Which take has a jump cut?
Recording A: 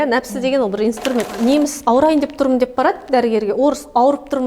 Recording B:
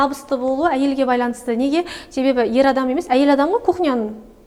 A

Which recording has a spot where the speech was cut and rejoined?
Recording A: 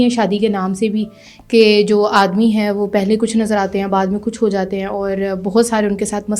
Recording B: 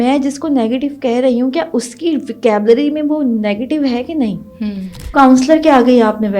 B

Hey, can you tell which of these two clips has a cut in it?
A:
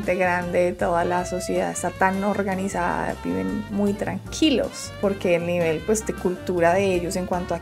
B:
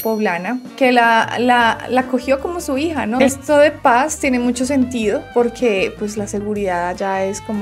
B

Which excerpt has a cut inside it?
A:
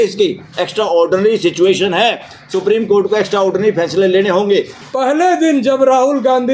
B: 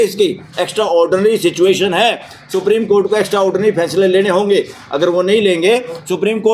A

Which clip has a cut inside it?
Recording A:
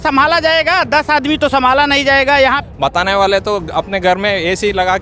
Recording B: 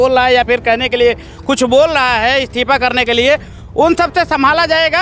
A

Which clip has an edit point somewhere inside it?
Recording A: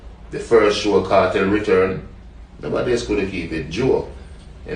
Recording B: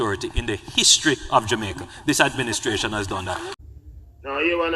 B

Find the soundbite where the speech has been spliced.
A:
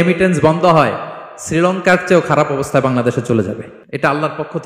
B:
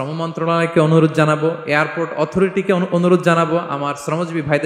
A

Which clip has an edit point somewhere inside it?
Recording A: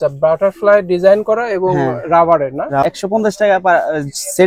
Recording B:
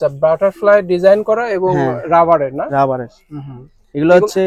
A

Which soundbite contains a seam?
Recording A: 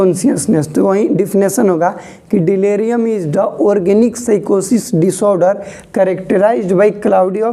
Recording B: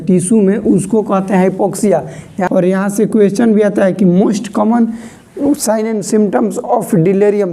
B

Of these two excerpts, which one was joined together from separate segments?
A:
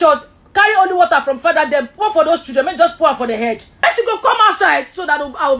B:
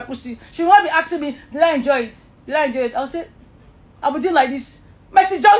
A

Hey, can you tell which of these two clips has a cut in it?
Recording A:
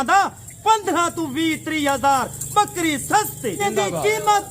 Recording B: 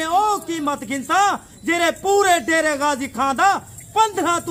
A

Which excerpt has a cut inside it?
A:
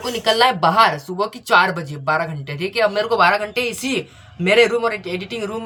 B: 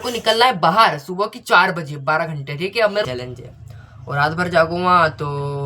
B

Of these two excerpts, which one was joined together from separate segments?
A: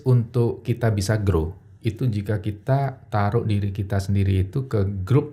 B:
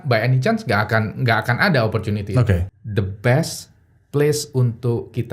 B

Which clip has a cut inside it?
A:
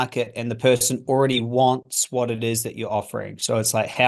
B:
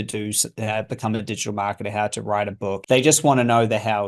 B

